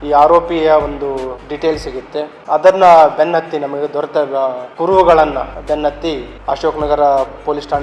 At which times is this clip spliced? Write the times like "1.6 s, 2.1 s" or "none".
1.4 s, 2.4 s, 4.6 s, 5.6 s, 6.3 s